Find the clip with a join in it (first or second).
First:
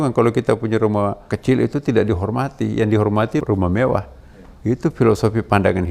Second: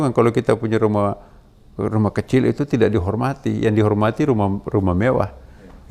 first